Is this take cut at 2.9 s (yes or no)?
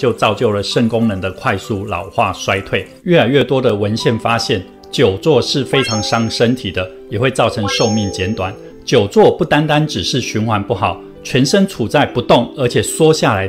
yes